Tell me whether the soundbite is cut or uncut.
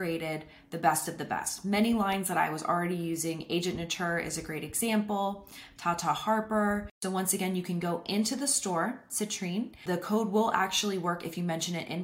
cut